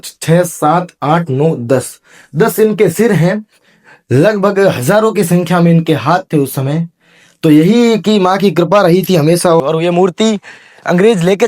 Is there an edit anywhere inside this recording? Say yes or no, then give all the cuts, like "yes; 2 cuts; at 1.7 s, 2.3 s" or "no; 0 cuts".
yes; 1 cut; at 9.6 s